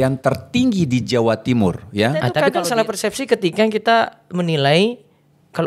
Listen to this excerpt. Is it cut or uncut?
cut